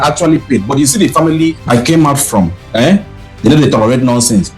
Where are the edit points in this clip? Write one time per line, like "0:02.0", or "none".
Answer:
0:01.6

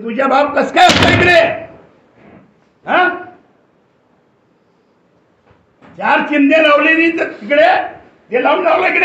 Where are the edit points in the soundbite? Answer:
none

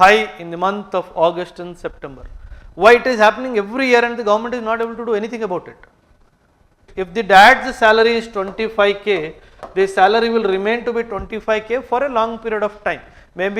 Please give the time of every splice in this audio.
0:07.0

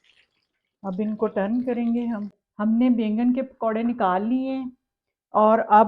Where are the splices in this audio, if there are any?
0:02.4

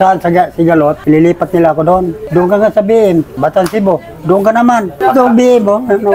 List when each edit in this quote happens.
0:01.0
0:03.4
0:04.9

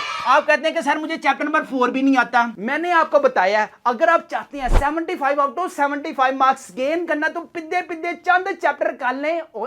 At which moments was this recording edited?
0:02.5

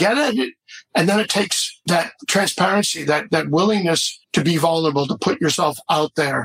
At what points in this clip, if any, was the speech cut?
0:01.8
0:04.1

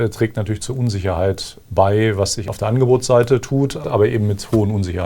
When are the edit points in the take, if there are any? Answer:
0:02.4
0:03.8

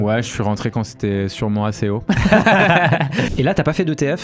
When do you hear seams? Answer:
0:03.3

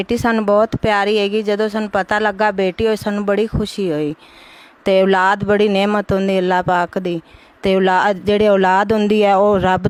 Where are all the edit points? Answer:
none

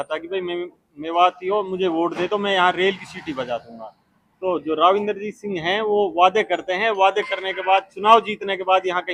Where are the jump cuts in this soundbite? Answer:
none

